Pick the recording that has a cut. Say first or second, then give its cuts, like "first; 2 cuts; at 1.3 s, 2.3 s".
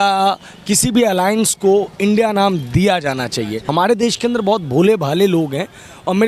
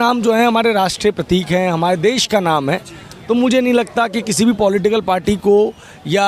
first; 1 cut; at 3.7 s